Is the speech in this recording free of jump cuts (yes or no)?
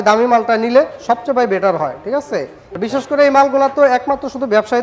no